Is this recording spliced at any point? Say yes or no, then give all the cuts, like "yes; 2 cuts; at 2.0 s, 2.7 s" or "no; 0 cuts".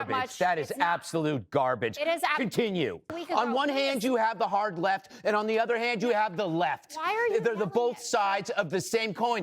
yes; 1 cut; at 3.2 s